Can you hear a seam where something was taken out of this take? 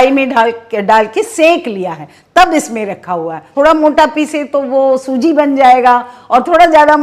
yes; 1 cut; at 3.5 s

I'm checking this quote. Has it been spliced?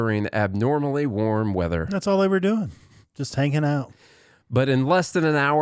no; 0 cuts

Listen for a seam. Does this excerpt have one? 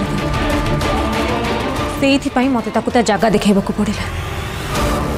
yes; 1 cut; at 1.9 s

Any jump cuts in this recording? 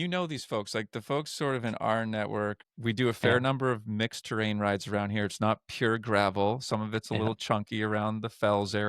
yes; 1 cut; at 2.6 s

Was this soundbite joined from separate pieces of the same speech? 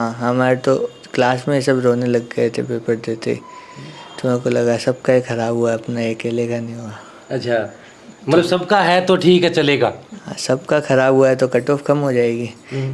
no; 0 cuts

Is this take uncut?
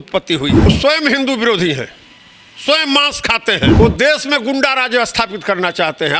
no; 2 cuts; at 0.7 s, 3.8 s

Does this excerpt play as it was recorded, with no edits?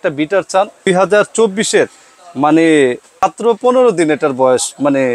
no; 2 cuts; at 0.9 s, 3.2 s

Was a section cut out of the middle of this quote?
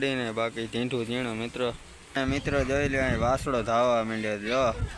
yes; 1 cut; at 2.2 s

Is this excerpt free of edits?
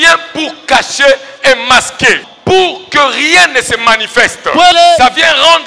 no; 2 cuts; at 2.3 s, 4.7 s

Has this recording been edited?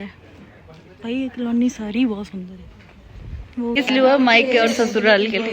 yes; 1 cut; at 3.7 s

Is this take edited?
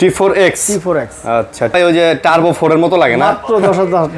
yes; 1 cut; at 1.7 s

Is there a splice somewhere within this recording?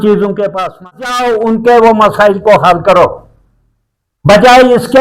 yes; 1 cut; at 1.0 s

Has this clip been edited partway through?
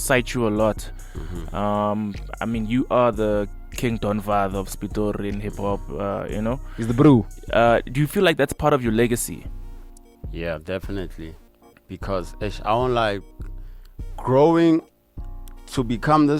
no; 0 cuts

